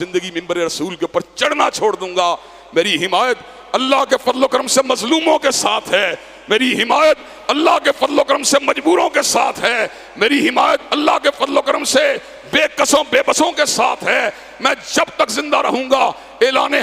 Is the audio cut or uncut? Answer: uncut